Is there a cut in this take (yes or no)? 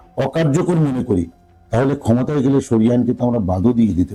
no